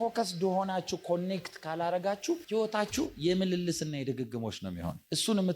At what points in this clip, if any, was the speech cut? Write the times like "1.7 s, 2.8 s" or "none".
2.4 s